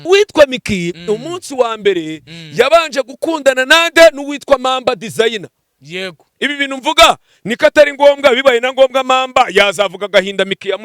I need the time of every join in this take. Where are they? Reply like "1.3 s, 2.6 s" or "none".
6.3 s